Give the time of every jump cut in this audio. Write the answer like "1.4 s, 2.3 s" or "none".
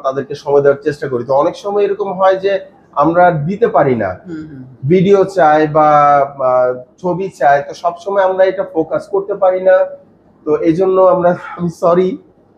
none